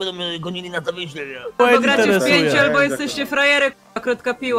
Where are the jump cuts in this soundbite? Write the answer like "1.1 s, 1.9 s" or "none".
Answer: 1.4 s

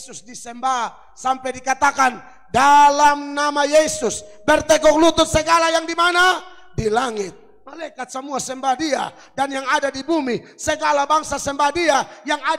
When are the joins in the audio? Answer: none

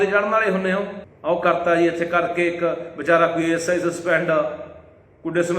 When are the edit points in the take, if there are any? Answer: 1.0 s

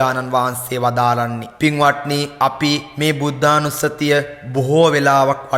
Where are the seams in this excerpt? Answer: 1.4 s, 2.9 s, 4.4 s

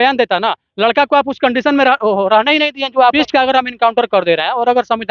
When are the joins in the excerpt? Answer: 3.1 s

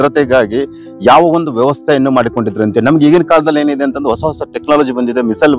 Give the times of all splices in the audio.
none

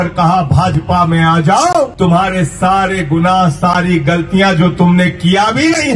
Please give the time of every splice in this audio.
1.9 s

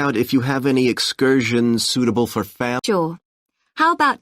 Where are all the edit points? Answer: 2.8 s

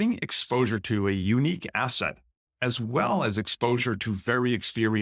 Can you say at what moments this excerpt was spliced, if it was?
none

